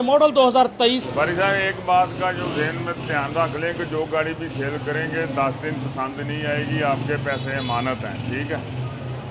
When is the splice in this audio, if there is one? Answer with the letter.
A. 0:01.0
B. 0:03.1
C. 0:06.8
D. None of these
A